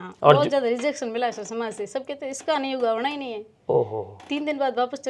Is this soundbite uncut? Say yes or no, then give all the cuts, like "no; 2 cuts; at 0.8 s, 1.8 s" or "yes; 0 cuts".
yes; 0 cuts